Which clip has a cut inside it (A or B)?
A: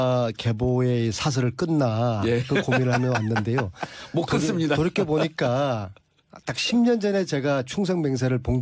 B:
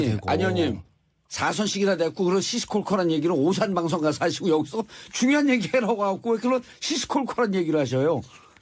B